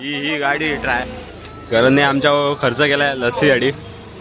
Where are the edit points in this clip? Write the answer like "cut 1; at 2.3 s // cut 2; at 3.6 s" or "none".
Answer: cut 1; at 1.0 s